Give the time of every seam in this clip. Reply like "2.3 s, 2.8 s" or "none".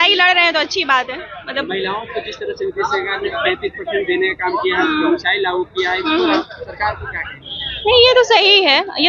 none